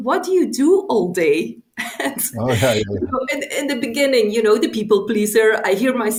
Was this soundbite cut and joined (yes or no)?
no